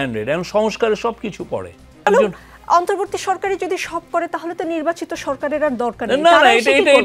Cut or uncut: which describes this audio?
cut